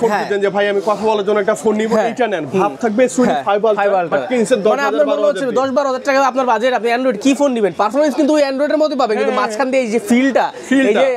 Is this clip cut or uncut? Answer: uncut